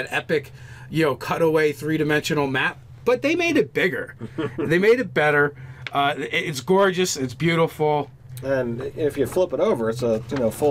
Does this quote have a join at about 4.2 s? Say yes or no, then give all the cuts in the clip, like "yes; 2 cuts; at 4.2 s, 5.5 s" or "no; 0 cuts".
no; 0 cuts